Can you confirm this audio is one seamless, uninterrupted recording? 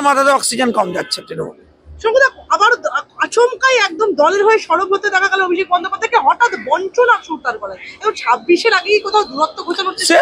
yes; 0 cuts

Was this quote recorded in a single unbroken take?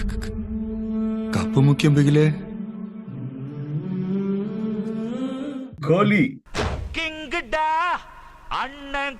no; 1 cut; at 5.8 s

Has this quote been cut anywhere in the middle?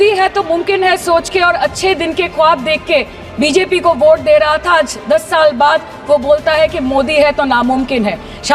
no; 0 cuts

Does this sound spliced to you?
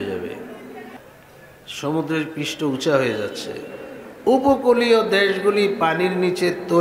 yes; 1 cut; at 1.0 s

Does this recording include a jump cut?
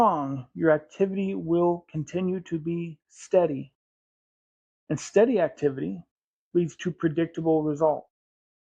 no; 0 cuts

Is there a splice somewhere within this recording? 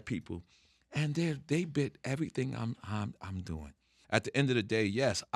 yes; 1 cut; at 4.0 s

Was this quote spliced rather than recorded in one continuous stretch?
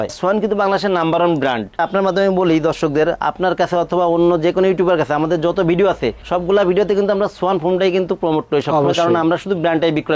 no; 0 cuts

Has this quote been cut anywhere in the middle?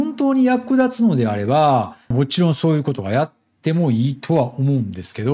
no; 0 cuts

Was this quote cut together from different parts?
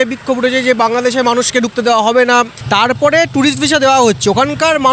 yes; 1 cut; at 2.6 s

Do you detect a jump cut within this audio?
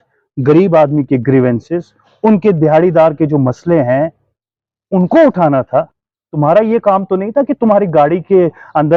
no; 0 cuts

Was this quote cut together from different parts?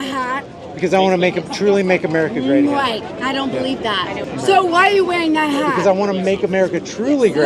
yes; 1 cut; at 4.2 s

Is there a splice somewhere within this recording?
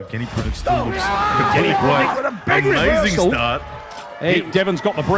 no; 0 cuts

